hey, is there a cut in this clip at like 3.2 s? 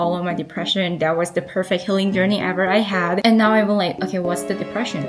yes; 1 cut; at 3.2 s

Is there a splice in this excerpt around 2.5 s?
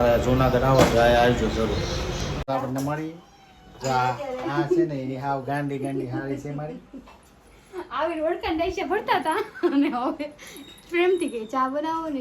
yes; 1 cut; at 2.5 s

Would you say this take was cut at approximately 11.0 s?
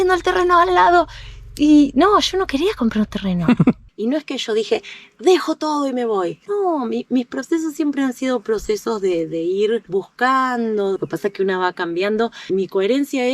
yes; 2 cuts; at 3.9 s, 11.0 s

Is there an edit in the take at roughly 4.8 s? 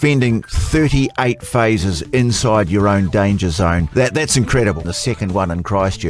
yes; 2 cuts; at 3.9 s, 4.8 s

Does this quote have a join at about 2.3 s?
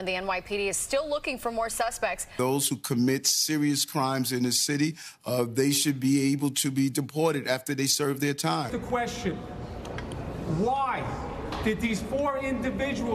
no; 0 cuts

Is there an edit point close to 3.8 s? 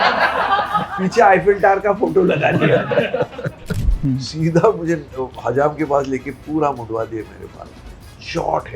yes; 1 cut; at 3.8 s

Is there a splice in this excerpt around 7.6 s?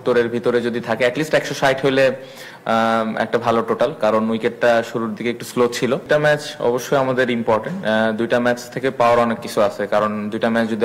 no; 1 cut; at 6.1 s

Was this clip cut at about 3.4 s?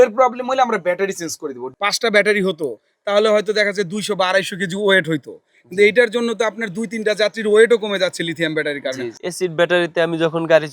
no; 2 cuts; at 1.7 s, 9.1 s

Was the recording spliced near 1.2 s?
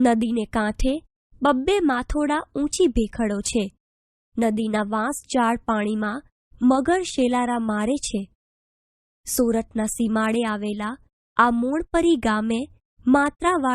yes; 1 cut; at 1.2 s

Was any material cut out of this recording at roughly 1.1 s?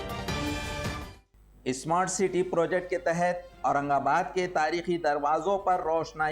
yes; 1 cut; at 1.1 s

